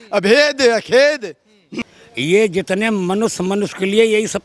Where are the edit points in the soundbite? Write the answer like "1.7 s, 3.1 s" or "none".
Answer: 1.7 s